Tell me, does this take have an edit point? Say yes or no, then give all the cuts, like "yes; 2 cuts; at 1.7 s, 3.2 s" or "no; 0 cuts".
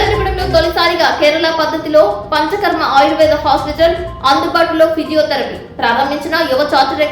no; 0 cuts